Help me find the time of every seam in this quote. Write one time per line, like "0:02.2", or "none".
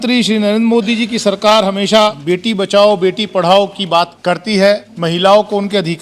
0:02.2
0:04.1
0:04.9